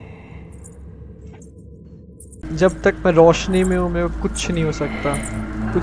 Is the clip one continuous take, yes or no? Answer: no